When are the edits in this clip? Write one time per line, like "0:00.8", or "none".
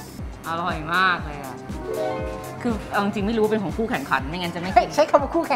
none